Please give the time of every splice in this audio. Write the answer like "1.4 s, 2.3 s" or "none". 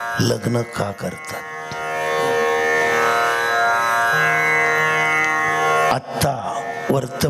none